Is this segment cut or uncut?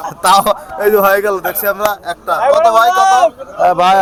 uncut